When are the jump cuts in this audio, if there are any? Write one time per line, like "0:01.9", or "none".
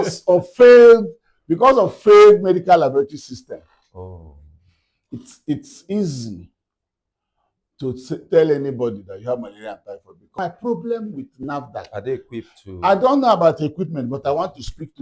0:10.4